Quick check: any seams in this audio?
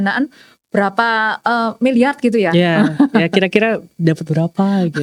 no; 0 cuts

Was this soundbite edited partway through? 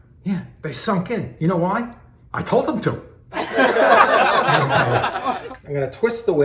yes; 1 cut; at 5.5 s

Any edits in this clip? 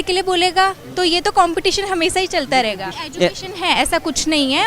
yes; 1 cut; at 3.0 s

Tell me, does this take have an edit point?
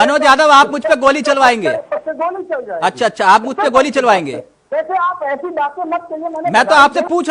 no; 0 cuts

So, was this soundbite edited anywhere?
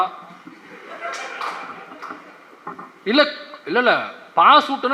no; 0 cuts

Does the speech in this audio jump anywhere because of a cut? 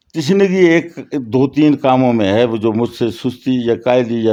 no; 0 cuts

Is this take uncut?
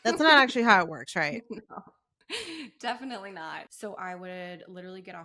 no; 1 cut; at 3.7 s

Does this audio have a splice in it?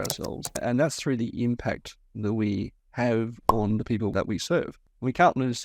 yes; 1 cut; at 4.1 s

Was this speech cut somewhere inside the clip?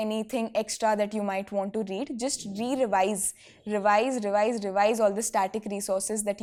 no; 0 cuts

